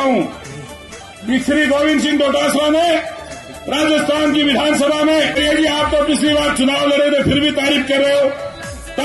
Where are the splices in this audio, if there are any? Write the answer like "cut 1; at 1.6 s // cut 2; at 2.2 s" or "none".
cut 1; at 5.4 s